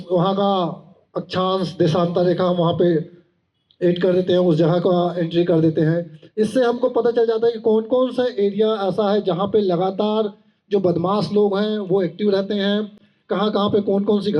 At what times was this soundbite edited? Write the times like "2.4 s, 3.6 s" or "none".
none